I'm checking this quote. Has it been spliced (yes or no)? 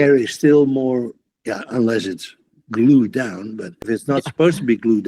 yes